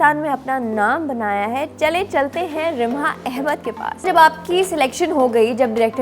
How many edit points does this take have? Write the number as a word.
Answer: one